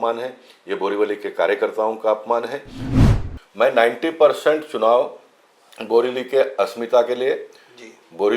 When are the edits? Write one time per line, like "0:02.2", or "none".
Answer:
0:03.0